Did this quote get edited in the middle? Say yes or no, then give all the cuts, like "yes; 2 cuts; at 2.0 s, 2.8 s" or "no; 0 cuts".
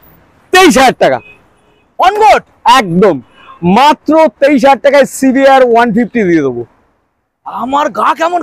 no; 0 cuts